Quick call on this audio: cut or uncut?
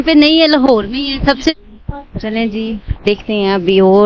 cut